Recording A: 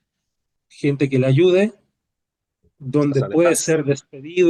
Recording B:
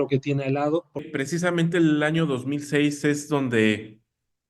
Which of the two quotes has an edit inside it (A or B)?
B